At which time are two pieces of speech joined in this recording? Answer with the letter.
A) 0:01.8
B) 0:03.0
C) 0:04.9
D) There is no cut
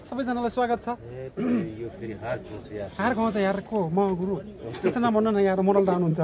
D